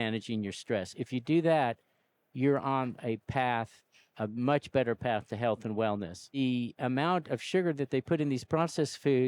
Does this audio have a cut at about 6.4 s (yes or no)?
yes